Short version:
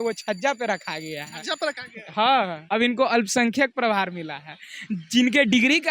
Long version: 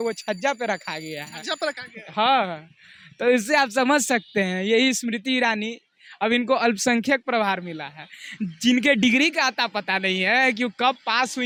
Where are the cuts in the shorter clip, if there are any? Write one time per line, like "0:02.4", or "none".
0:02.6

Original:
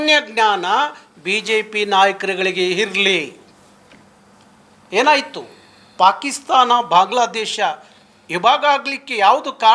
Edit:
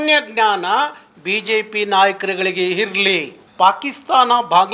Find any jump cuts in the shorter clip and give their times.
0:03.4

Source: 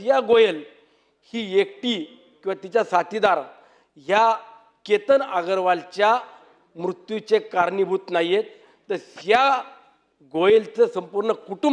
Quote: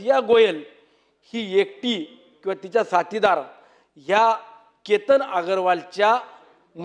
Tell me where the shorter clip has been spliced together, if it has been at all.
none

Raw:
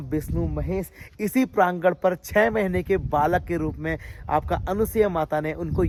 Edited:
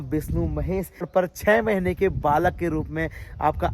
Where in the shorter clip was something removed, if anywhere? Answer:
0:01.1

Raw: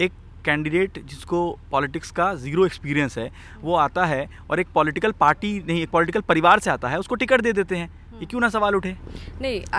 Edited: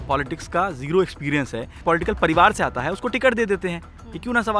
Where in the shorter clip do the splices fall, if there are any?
0:01.8

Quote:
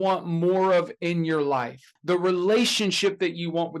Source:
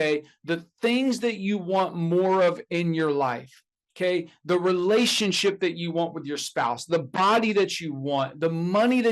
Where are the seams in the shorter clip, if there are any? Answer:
0:01.9

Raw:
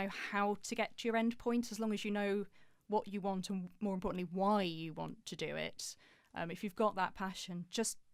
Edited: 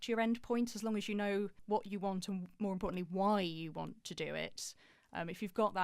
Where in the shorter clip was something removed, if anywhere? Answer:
0:01.6

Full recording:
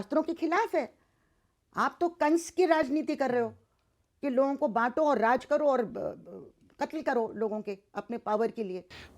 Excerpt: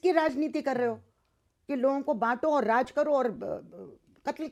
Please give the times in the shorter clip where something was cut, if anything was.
none

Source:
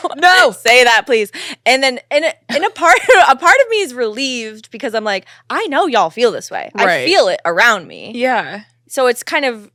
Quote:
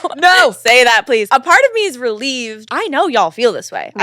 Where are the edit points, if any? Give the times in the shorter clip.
0:01.3
0:02.6

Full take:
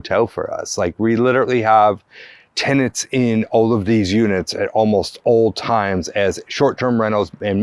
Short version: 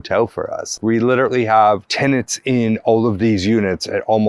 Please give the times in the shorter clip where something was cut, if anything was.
0:00.7
0:01.9

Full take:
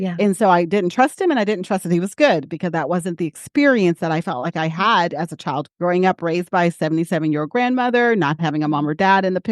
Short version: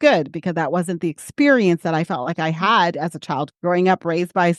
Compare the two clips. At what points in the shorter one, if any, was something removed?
none

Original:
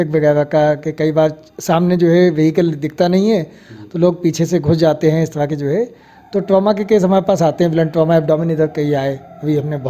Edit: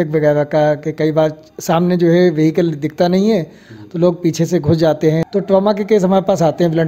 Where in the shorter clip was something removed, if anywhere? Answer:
0:05.3

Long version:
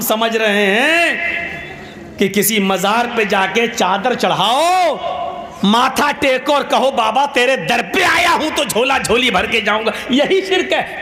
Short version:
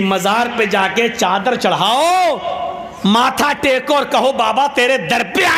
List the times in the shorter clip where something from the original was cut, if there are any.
none

